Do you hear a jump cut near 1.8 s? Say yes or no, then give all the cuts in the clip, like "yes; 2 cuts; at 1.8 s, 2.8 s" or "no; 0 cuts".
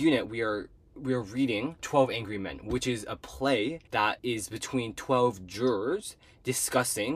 yes; 2 cuts; at 1.8 s, 4.0 s